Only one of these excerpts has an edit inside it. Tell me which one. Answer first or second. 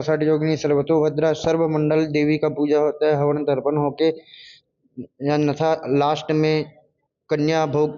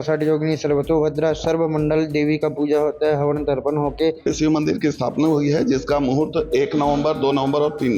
second